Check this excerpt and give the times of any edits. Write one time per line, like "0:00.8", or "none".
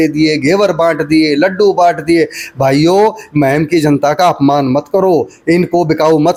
none